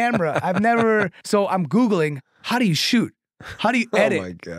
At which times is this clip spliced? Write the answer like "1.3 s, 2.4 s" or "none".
1.2 s